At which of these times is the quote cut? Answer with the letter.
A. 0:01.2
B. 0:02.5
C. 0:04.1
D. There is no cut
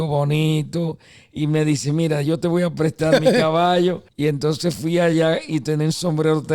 C